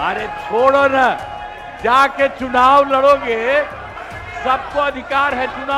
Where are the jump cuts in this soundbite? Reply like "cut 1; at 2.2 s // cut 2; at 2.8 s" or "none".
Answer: none